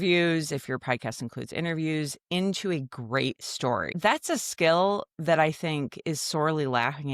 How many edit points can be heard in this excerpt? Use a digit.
1